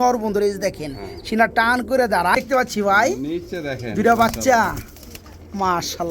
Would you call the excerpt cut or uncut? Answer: cut